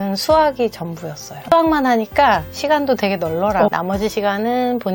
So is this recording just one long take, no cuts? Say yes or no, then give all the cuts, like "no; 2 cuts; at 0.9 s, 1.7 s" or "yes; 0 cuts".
no; 2 cuts; at 1.3 s, 3.7 s